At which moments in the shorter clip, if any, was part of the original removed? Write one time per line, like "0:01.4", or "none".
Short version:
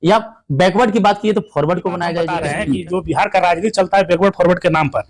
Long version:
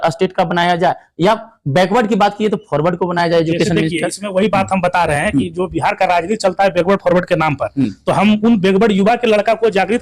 0:02.3